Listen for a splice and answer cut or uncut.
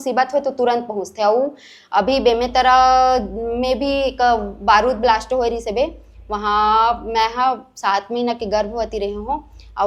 uncut